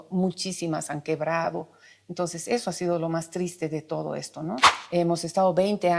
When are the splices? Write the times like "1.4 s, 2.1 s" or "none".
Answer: 4.7 s